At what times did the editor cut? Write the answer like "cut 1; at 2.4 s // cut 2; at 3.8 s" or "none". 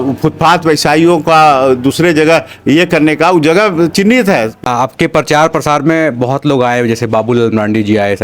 cut 1; at 4.6 s